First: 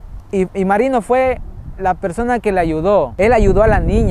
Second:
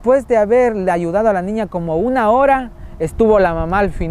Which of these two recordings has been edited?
first; 1 cut; at 3.1 s

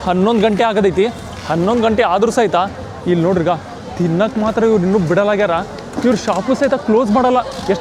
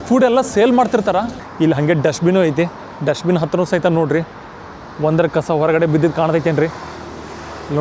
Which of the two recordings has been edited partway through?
second; 1 cut; at 1.4 s

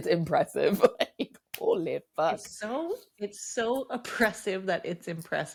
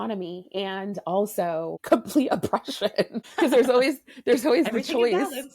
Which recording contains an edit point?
second; 2 cuts; at 1.8 s, 3.2 s

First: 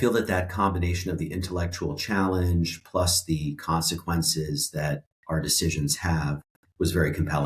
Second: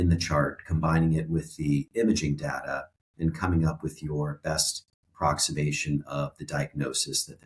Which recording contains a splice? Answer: first; 1 cut; at 5.1 s

